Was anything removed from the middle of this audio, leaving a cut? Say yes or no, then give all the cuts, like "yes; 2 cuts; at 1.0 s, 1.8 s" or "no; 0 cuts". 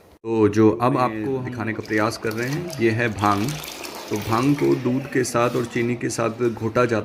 yes; 1 cut; at 1.2 s